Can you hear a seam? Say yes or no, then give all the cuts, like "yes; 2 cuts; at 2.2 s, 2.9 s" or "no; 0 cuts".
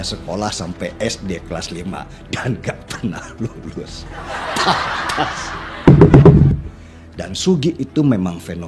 yes; 1 cut; at 6.3 s